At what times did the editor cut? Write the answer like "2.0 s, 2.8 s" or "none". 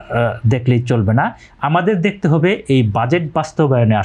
none